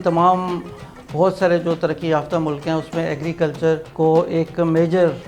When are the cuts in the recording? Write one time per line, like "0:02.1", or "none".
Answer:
0:03.9